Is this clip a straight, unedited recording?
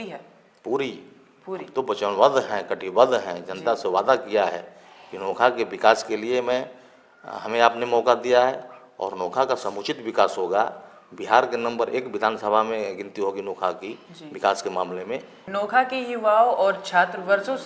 no; 1 cut; at 15.4 s

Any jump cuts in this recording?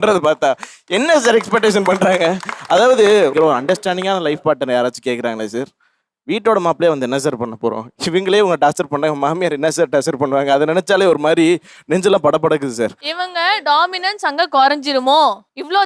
yes; 1 cut; at 13.0 s

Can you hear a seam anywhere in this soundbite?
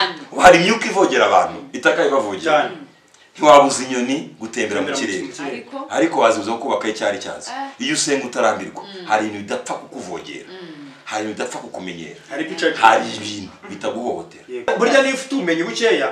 yes; 1 cut; at 14.7 s

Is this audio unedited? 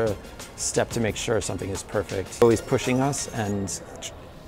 no; 1 cut; at 2.4 s

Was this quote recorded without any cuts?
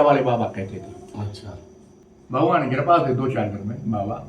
no; 1 cut; at 2.0 s

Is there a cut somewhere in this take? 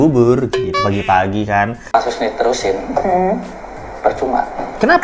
yes; 1 cut; at 1.8 s

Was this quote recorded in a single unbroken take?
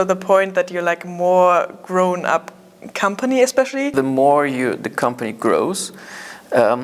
no; 1 cut; at 3.9 s

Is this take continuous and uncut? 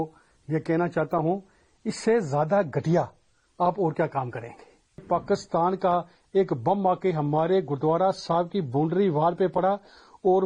no; 1 cut; at 5.0 s

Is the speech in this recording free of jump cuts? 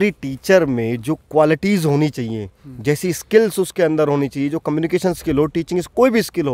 yes; 0 cuts

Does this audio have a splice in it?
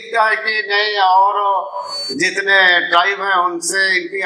no; 0 cuts

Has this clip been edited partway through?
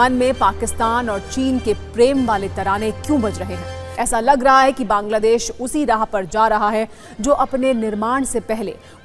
no; 0 cuts

